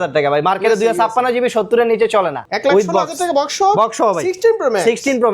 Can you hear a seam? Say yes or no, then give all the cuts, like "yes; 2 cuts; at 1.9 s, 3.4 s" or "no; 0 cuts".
yes; 1 cut; at 2.4 s